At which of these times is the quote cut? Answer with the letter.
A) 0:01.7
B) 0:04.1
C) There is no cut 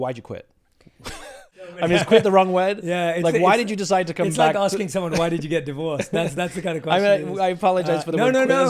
A